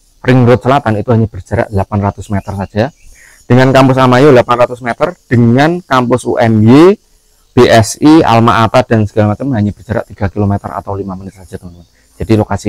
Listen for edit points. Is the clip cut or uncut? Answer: uncut